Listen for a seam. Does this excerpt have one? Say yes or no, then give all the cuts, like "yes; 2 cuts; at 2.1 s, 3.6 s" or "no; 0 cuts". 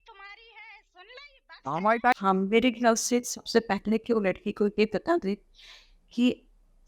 yes; 1 cut; at 2.2 s